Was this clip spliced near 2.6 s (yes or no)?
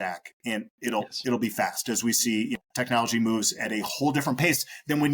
yes